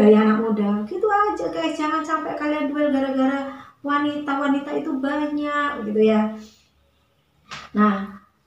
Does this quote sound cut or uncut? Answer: uncut